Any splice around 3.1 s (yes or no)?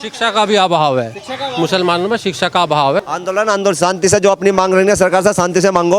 yes